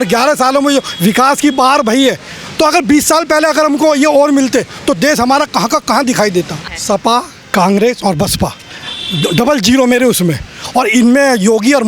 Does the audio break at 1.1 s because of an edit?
no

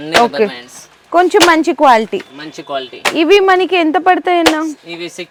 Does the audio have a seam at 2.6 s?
no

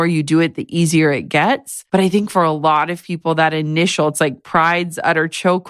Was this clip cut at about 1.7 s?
yes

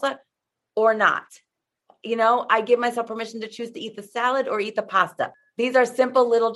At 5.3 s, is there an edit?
yes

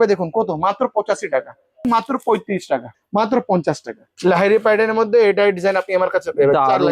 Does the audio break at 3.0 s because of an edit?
yes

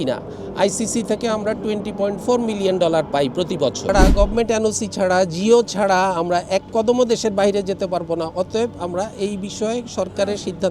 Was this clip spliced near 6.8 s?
no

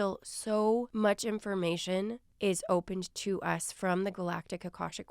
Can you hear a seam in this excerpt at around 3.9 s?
no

